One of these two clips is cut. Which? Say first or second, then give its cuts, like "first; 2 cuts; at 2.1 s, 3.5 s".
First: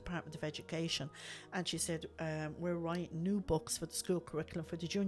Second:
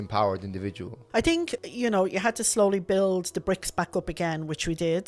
second; 2 cuts; at 0.9 s, 1.6 s